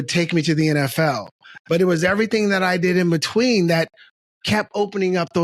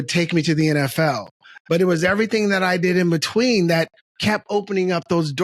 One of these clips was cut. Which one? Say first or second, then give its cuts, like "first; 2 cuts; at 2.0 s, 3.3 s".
second; 1 cut; at 4.0 s